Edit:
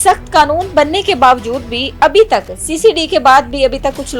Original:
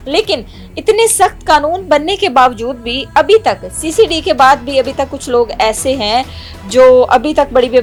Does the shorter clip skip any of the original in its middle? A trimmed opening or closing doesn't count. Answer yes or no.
no